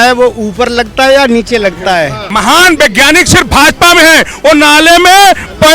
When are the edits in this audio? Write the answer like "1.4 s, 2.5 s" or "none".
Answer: 2.3 s